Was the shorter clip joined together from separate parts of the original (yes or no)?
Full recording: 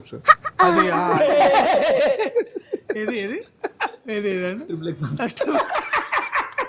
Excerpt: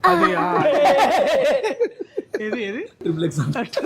yes